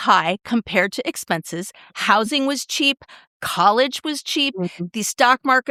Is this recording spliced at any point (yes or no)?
no